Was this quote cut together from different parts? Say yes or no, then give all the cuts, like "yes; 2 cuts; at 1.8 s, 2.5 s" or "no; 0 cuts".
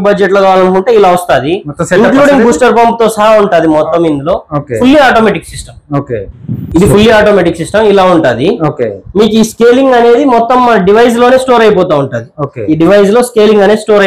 no; 0 cuts